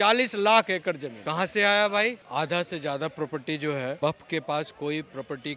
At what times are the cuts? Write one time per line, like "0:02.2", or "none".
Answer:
0:01.1
0:02.2
0:04.0